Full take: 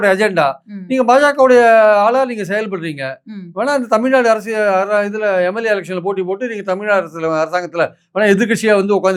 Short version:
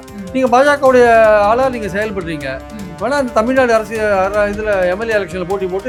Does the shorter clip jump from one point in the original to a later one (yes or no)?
no